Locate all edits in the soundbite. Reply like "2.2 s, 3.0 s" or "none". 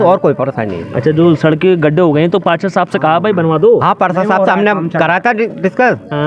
none